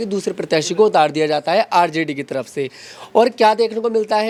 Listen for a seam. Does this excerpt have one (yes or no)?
no